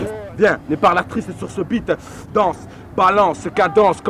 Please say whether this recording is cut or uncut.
uncut